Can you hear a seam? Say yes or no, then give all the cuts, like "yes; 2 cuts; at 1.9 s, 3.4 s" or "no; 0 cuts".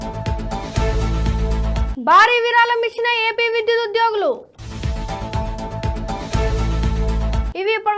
no; 0 cuts